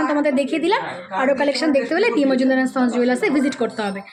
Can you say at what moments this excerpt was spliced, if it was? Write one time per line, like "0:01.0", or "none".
none